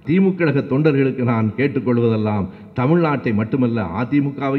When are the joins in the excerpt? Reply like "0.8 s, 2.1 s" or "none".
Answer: none